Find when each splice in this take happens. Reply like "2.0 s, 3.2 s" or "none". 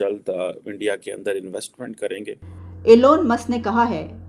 2.7 s